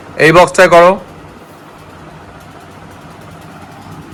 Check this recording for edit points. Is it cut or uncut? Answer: uncut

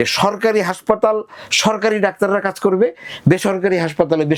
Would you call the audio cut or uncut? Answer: uncut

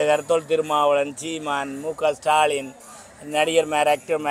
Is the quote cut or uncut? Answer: uncut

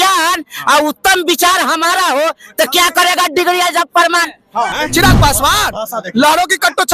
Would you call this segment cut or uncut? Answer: cut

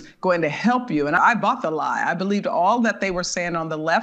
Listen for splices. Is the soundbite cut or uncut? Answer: cut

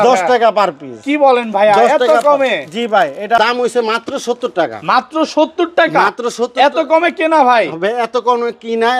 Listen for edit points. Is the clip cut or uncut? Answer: cut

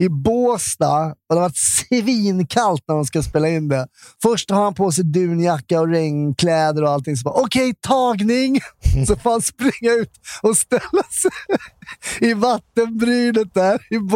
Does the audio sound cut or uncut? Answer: cut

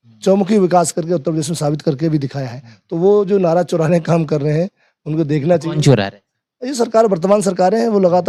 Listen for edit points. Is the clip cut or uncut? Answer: uncut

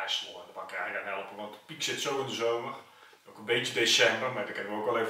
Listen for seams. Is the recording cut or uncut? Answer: uncut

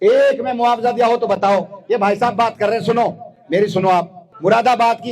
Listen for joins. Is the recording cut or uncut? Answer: cut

